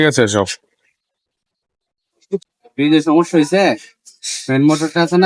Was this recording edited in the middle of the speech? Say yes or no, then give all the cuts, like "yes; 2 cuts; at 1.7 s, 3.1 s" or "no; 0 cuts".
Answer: yes; 1 cut; at 2.4 s